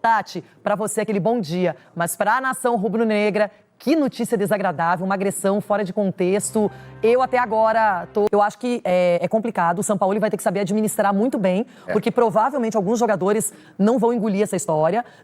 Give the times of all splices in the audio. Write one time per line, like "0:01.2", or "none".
0:08.3